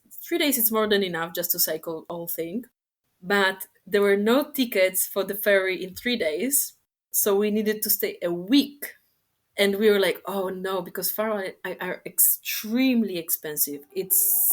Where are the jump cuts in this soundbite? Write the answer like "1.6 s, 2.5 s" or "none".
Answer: 2.1 s